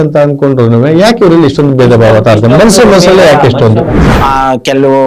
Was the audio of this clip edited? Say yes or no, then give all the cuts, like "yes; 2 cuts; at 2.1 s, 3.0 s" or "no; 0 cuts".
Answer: yes; 1 cut; at 4.0 s